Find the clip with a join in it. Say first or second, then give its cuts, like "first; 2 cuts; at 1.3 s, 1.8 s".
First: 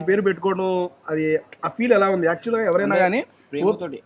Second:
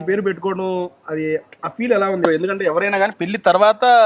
second; 1 cut; at 2.3 s